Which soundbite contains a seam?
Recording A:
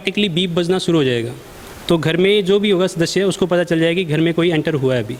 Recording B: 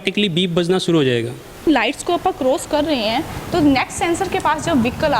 B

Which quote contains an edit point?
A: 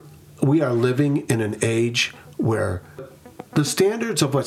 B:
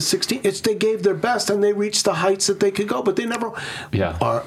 A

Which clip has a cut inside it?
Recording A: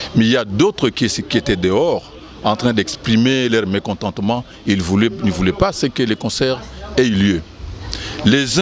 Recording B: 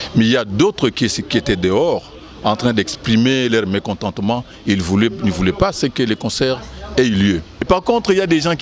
B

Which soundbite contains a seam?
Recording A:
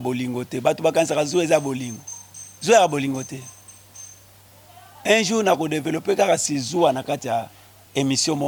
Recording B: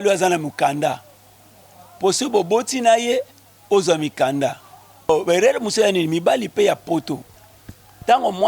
B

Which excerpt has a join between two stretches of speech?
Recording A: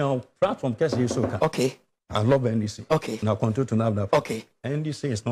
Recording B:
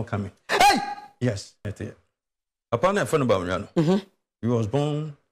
B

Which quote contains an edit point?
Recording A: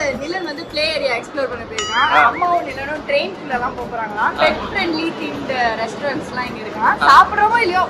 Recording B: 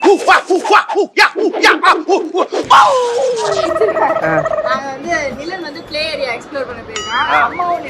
B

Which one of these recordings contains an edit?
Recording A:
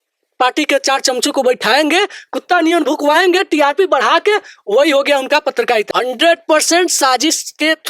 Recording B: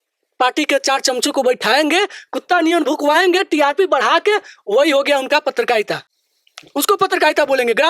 A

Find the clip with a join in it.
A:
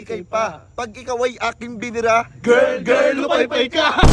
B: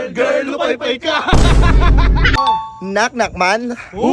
B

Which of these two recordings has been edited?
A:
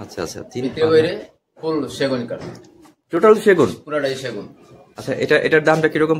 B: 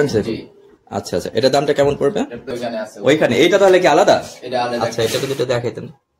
B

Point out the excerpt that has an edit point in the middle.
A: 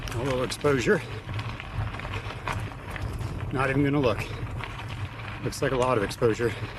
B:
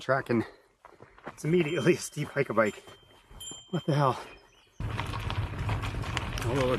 B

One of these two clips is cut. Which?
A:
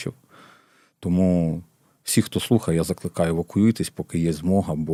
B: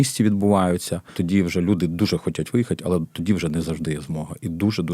B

